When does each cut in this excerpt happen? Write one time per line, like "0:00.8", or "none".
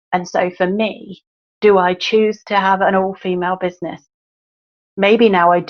none